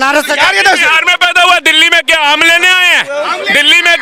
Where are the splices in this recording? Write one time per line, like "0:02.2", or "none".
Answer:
none